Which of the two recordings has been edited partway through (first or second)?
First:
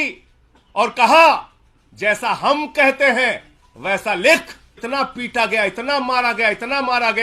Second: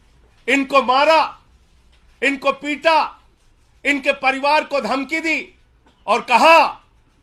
first